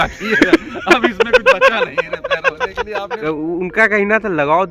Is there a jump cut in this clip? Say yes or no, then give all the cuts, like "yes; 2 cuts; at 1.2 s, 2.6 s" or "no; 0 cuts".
yes; 1 cut; at 3.1 s